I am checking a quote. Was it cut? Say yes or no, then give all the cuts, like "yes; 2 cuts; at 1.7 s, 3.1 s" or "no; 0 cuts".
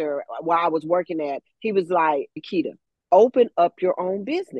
yes; 1 cut; at 2.4 s